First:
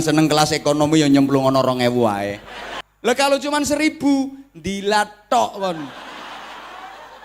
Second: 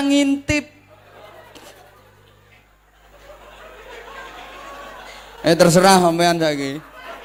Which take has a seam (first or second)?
first